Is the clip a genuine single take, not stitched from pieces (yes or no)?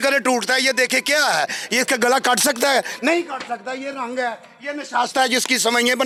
yes